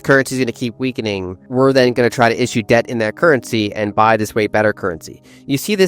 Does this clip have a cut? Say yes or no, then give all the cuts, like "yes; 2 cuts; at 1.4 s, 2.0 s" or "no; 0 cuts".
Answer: yes; 1 cut; at 1.3 s